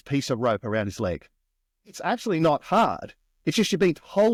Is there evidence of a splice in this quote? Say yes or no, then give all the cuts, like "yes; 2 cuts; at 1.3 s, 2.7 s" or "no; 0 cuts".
no; 0 cuts